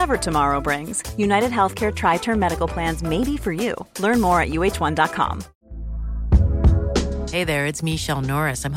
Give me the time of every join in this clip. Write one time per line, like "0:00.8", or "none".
0:05.5